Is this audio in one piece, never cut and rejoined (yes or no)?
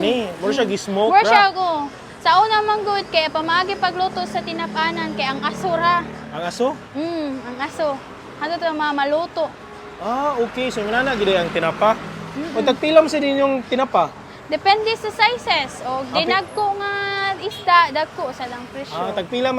yes